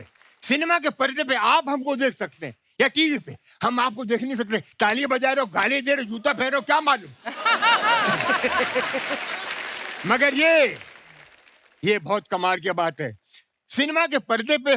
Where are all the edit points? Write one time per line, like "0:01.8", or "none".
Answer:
none